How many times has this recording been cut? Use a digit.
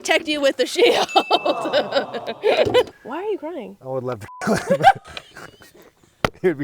1